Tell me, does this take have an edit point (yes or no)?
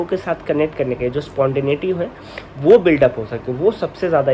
no